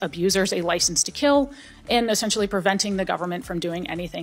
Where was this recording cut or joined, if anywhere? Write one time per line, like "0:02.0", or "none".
none